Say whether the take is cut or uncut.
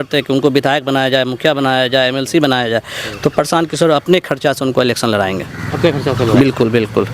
uncut